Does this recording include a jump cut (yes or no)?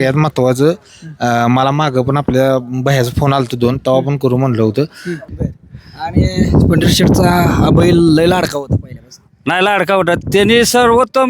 yes